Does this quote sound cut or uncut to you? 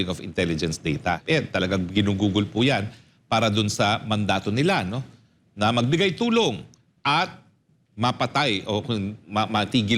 cut